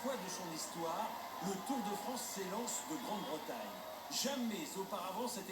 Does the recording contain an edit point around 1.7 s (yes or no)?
no